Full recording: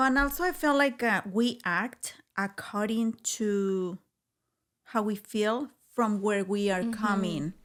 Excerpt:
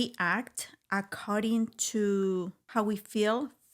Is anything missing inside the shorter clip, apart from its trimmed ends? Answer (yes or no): yes